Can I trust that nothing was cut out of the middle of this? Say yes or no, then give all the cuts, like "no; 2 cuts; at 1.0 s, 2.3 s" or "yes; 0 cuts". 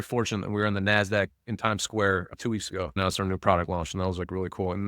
no; 1 cut; at 2.4 s